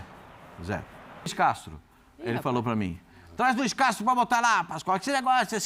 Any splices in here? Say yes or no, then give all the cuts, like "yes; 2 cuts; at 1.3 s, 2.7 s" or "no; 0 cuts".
yes; 1 cut; at 1.3 s